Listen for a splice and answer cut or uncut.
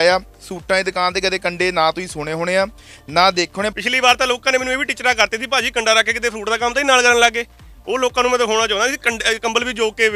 cut